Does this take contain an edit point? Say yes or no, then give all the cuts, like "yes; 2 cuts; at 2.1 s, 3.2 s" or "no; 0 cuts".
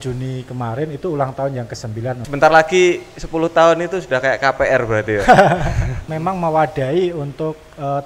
yes; 2 cuts; at 2.2 s, 5.9 s